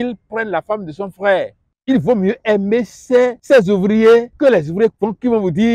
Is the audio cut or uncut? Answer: cut